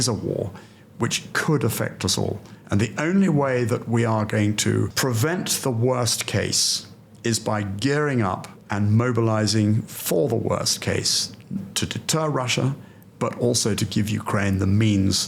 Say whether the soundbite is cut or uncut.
uncut